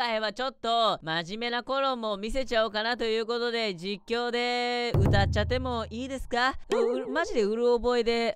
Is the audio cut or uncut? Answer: cut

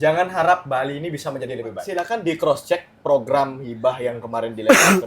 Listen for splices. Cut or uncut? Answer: cut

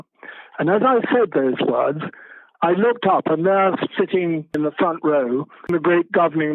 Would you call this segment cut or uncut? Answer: cut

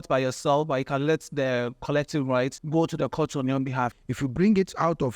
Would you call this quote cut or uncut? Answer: cut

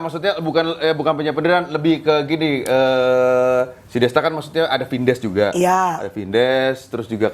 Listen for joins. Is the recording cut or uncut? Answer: uncut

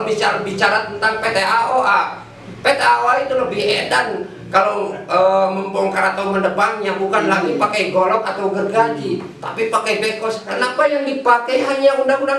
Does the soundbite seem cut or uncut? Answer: cut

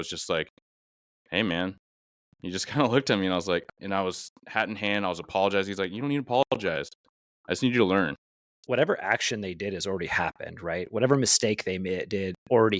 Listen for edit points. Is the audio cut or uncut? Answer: cut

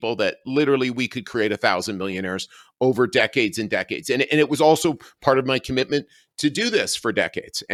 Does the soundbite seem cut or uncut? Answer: uncut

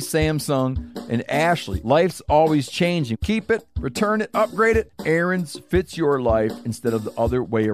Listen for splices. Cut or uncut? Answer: cut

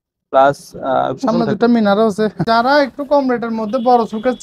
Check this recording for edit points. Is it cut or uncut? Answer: cut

